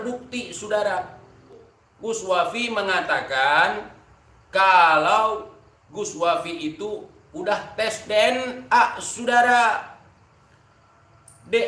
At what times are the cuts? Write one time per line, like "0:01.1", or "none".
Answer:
0:01.6